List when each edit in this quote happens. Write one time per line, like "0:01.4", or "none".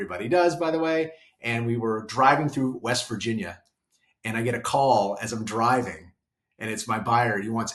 none